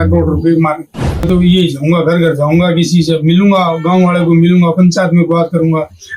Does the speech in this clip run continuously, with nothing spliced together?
no; 1 cut; at 1.3 s

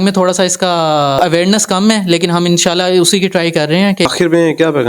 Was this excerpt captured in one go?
no; 2 cuts; at 1.2 s, 4.1 s

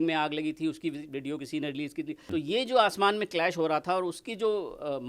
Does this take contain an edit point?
yes; 1 cut; at 2.3 s

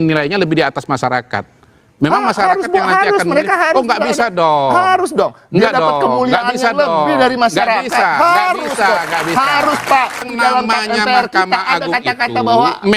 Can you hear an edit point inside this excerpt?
yes; 1 cut; at 10.3 s

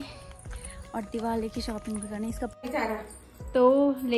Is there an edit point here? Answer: yes; 1 cut; at 2.5 s

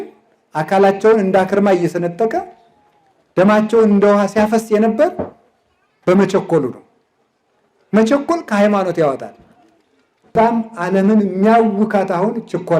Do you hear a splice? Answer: yes; 1 cut; at 10.3 s

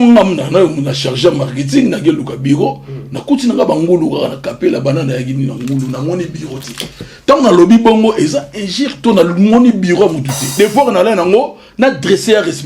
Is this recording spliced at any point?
yes; 1 cut; at 10.5 s

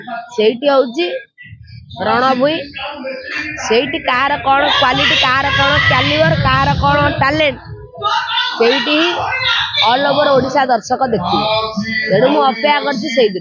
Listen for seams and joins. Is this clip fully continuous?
yes; 0 cuts

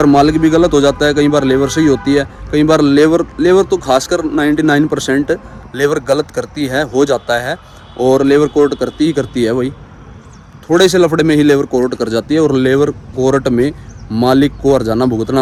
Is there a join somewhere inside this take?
no; 0 cuts

